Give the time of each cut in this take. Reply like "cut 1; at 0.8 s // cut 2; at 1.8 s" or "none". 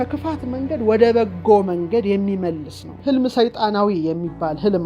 cut 1; at 3.0 s